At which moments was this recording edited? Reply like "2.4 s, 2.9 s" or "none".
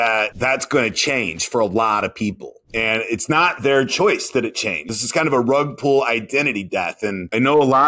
4.9 s